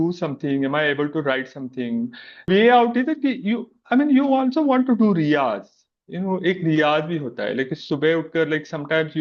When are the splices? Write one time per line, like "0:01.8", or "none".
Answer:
0:02.5